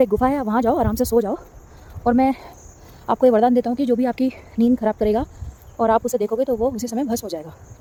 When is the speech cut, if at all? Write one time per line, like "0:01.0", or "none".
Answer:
none